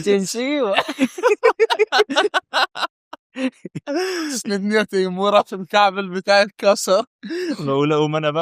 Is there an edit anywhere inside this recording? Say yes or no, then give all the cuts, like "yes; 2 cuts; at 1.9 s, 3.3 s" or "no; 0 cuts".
yes; 1 cut; at 7.2 s